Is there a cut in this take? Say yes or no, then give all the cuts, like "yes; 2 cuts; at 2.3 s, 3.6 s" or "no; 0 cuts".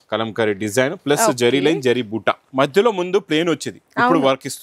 yes; 1 cut; at 2.5 s